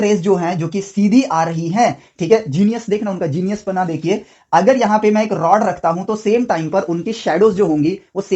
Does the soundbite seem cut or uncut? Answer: uncut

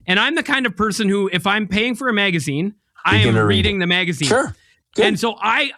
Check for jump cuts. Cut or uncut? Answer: uncut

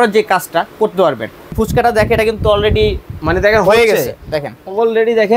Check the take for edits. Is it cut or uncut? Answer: cut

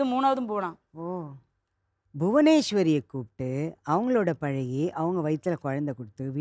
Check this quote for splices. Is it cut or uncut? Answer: cut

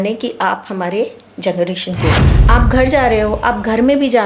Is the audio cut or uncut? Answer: cut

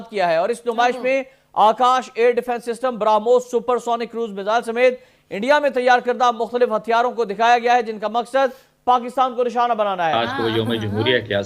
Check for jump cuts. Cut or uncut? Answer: cut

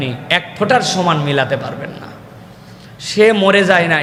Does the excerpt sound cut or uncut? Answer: uncut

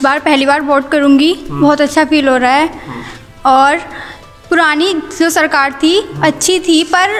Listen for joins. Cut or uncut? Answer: uncut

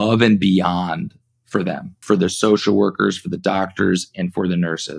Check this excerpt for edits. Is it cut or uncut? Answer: cut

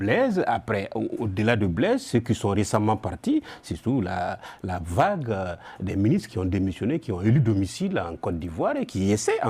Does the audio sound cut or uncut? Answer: uncut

